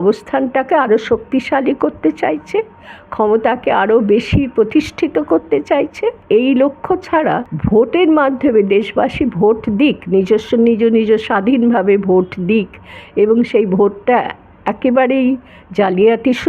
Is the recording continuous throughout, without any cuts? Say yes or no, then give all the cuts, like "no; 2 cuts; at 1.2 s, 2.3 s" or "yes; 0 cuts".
no; 2 cuts; at 6.2 s, 7.5 s